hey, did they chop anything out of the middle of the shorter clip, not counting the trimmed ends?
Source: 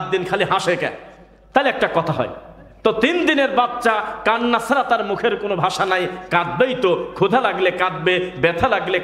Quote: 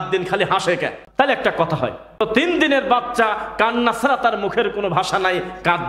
yes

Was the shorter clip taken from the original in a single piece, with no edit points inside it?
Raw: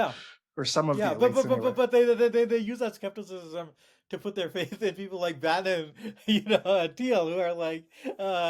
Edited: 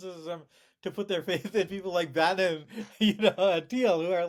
yes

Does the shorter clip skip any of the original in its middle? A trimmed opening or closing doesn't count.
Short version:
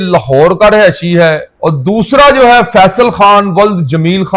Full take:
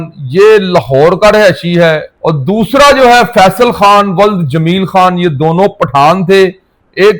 no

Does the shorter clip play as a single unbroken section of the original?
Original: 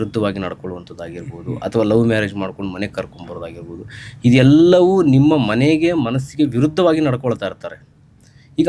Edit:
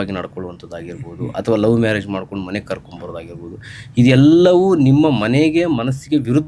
yes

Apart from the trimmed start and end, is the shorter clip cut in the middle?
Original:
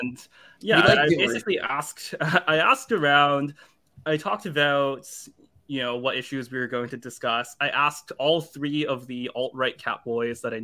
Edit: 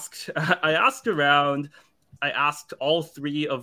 yes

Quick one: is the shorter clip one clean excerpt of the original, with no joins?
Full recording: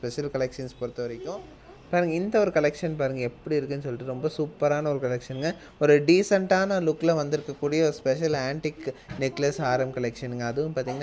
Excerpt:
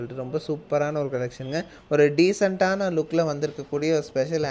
yes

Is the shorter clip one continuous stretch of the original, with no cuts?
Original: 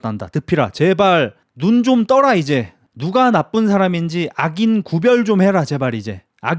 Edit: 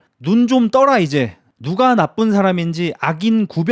yes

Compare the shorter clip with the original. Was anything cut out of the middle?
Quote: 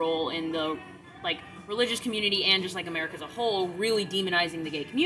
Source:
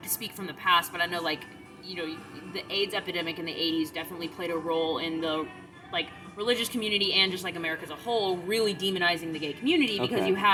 no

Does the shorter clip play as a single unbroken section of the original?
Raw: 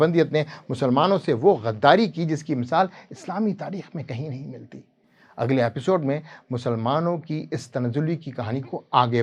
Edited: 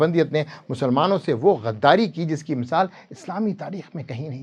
yes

